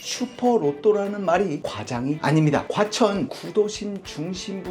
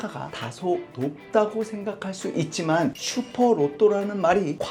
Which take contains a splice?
first; 1 cut; at 2.7 s

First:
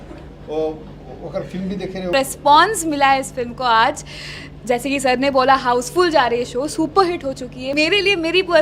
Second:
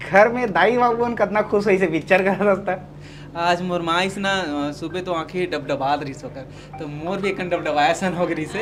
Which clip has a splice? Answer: first; 2 cuts; at 2.1 s, 7.6 s

